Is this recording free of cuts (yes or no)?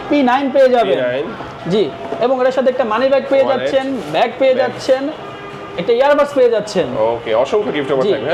yes